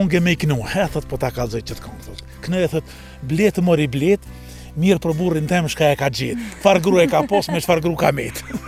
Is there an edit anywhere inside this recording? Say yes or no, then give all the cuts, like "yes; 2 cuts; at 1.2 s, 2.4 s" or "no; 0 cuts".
no; 0 cuts